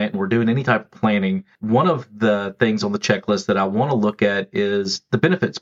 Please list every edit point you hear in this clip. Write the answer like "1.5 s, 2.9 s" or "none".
1.5 s